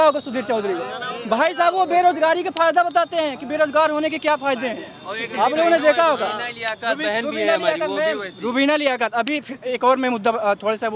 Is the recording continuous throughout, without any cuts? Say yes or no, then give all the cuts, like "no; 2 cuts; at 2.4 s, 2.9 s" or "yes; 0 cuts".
yes; 0 cuts